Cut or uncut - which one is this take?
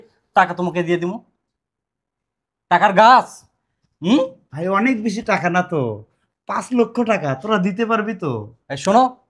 uncut